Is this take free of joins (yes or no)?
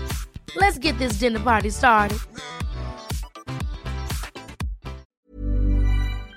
no